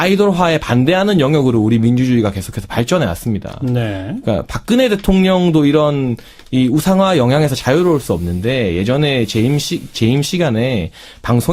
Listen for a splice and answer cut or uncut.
cut